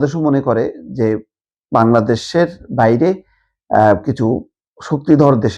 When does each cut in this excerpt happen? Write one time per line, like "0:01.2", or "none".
none